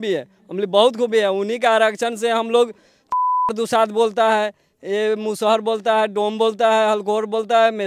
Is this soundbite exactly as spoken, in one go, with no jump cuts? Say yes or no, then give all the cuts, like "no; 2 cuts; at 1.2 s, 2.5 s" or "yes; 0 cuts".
yes; 0 cuts